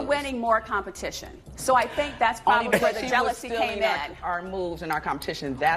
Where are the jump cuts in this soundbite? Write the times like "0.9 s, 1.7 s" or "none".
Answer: none